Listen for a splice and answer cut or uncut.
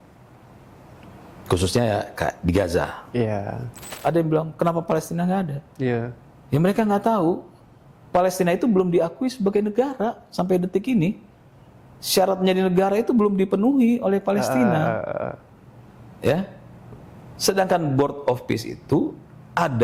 cut